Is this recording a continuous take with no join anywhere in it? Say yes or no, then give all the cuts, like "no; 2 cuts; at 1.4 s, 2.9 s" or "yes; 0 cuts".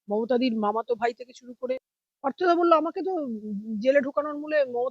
no; 1 cut; at 1.7 s